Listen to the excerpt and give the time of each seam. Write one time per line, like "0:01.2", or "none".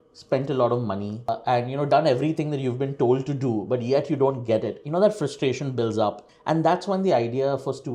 none